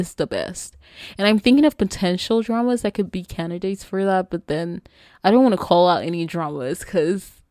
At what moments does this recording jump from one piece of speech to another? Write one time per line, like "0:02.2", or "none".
none